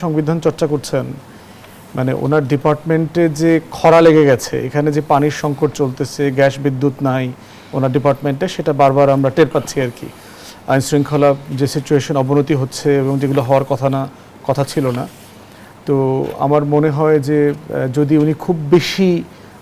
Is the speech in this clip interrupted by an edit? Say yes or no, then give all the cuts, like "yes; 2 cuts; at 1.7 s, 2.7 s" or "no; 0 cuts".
no; 0 cuts